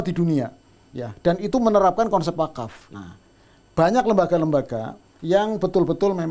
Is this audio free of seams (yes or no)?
no